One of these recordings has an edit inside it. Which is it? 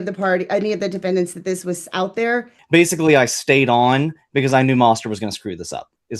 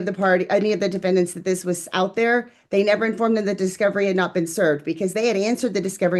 first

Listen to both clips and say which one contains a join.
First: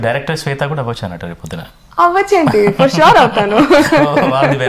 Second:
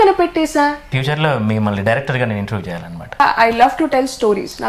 second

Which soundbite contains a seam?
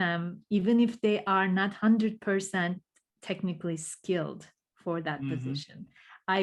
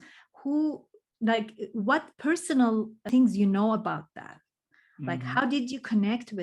second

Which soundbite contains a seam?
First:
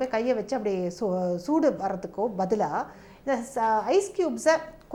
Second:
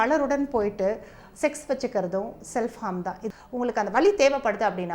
second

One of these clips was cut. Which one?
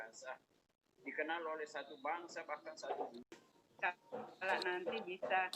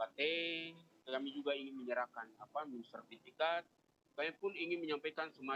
first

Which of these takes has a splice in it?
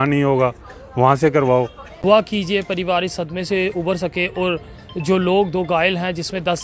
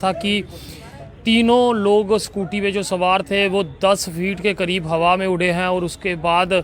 first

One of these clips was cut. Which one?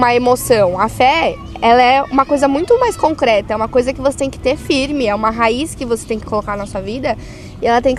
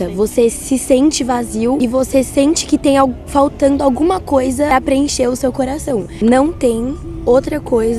second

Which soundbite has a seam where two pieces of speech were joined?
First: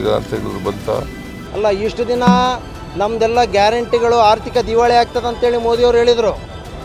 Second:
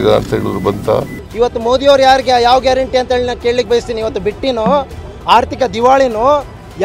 second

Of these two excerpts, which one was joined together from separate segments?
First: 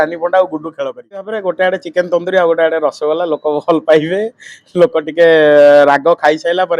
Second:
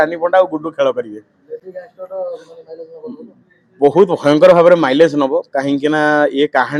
first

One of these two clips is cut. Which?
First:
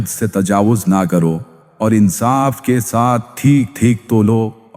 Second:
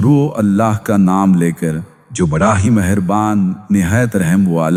first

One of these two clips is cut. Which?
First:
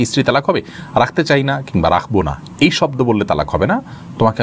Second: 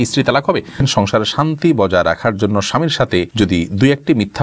second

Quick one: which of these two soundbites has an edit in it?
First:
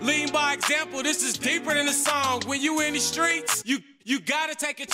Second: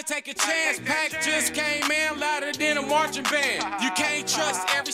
first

